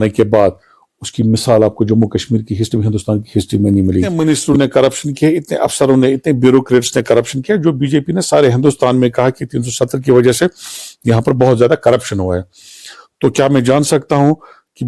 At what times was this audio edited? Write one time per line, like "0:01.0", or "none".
0:04.1

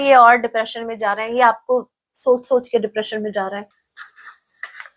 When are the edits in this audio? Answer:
0:03.8

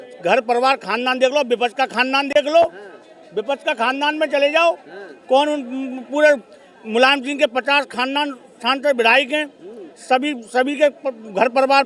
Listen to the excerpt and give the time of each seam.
none

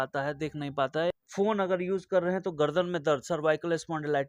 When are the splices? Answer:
0:01.1

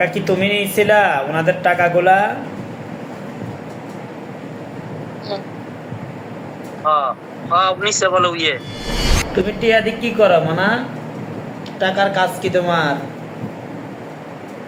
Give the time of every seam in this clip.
none

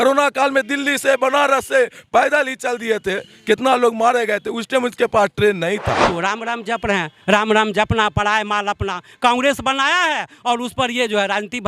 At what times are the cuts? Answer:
0:06.1

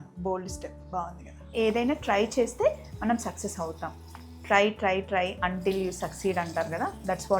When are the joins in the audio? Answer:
0:01.5

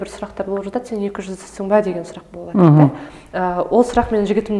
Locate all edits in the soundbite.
none

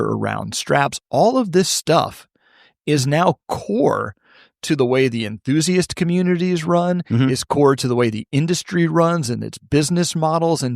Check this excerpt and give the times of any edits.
0:03.5

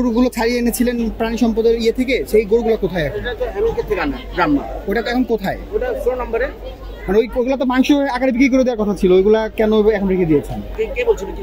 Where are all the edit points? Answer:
none

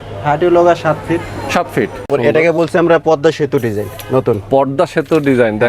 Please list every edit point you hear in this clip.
0:02.1

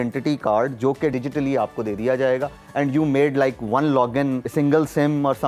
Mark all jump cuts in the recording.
0:01.1
0:04.5

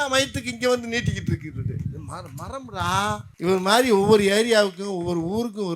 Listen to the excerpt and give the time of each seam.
0:03.3

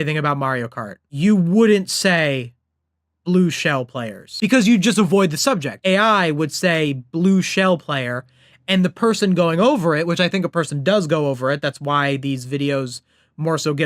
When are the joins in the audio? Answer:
0:04.2
0:05.8

